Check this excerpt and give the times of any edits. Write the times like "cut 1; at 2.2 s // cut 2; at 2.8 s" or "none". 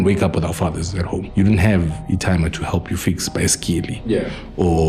cut 1; at 1.3 s